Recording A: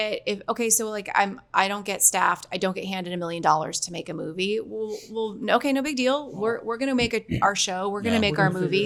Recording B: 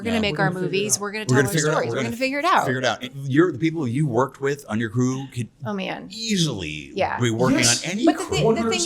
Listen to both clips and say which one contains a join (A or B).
B